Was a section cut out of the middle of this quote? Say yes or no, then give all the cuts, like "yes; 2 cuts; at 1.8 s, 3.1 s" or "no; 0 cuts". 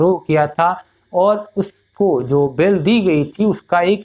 no; 0 cuts